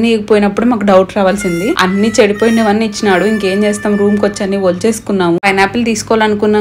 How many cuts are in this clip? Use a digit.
1